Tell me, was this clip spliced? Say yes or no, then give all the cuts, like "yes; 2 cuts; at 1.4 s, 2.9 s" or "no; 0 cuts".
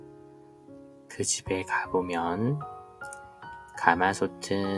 yes; 1 cut; at 1.0 s